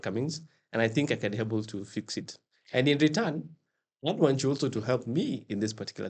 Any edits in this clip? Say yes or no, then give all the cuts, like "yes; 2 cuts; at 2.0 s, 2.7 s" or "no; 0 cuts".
no; 0 cuts